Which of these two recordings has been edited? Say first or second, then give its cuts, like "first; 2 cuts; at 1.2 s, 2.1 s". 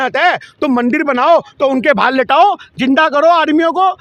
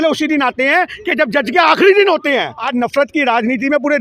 second; 1 cut; at 2.6 s